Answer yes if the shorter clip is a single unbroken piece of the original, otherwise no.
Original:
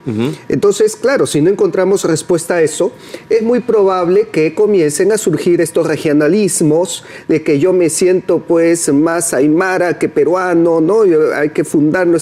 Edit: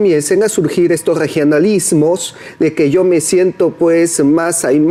yes